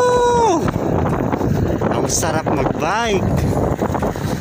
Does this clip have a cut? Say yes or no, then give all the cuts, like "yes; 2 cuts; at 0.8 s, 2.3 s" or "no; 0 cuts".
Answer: no; 0 cuts